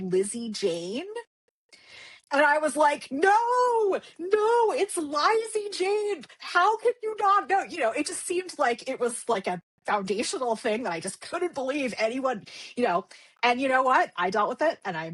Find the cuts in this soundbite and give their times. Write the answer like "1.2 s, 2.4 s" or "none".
none